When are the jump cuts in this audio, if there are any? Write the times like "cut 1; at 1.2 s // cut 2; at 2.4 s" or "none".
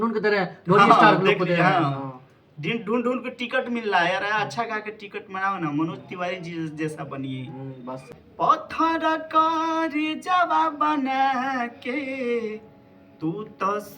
cut 1; at 8.1 s